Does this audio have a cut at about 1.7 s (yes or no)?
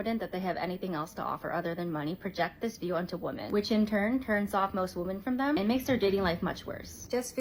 no